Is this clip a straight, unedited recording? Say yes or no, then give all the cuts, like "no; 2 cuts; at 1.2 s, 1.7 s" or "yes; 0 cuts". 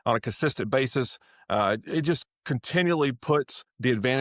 yes; 0 cuts